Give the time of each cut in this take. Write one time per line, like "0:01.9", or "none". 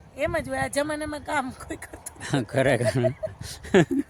none